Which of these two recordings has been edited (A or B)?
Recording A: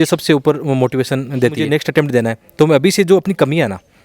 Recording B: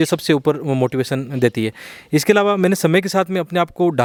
A